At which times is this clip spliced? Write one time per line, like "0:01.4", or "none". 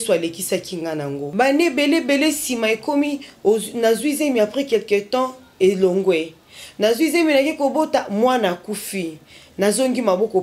0:01.2